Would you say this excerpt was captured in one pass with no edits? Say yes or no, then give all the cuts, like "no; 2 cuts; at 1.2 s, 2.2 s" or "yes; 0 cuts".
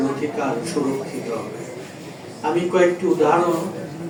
yes; 0 cuts